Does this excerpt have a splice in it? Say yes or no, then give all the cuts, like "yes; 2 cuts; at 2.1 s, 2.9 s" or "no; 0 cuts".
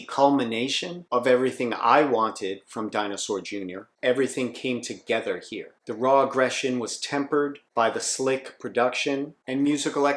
no; 0 cuts